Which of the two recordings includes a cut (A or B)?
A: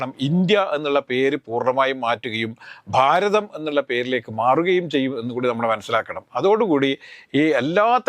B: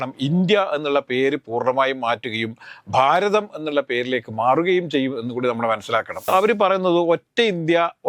B